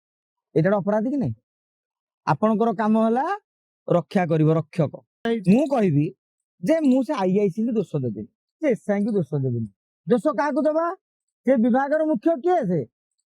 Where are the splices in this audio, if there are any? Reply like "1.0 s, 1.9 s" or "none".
5.2 s